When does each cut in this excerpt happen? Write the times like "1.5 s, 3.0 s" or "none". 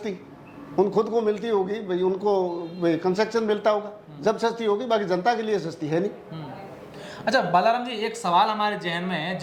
none